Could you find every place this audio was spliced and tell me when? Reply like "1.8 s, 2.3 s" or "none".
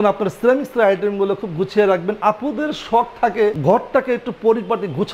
none

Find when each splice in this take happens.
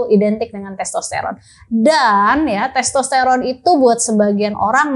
none

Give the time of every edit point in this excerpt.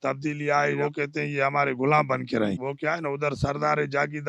0.8 s, 2.6 s

